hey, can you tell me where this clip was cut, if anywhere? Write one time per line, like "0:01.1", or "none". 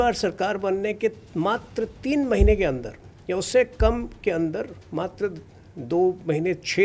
none